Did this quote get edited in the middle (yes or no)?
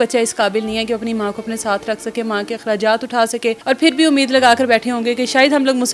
yes